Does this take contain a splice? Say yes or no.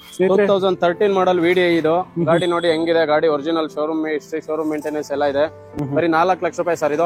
no